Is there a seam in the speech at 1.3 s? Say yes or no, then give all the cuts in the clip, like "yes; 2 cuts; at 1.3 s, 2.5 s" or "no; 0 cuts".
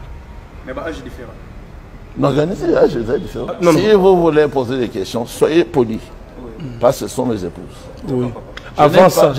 no; 1 cut; at 3.6 s